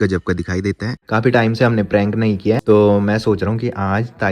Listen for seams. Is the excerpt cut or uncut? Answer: cut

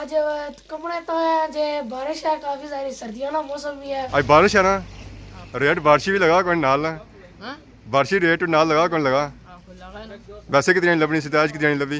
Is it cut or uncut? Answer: cut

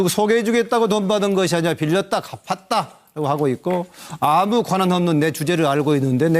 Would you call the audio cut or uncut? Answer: cut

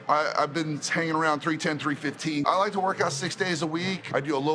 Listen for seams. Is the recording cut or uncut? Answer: cut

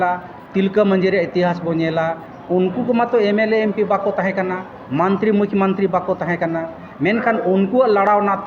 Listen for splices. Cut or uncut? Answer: uncut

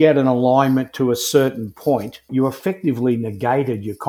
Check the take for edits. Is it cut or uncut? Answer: cut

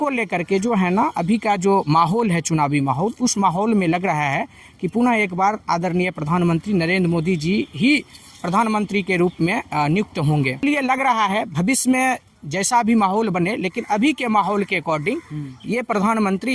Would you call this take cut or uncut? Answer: cut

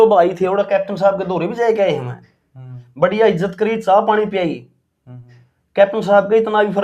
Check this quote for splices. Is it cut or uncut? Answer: uncut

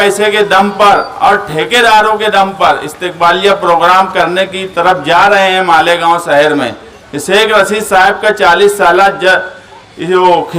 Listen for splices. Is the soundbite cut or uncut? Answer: uncut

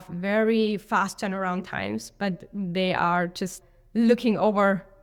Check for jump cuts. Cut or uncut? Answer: uncut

